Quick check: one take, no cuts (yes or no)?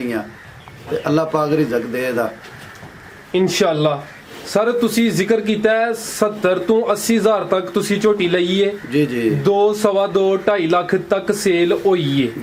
yes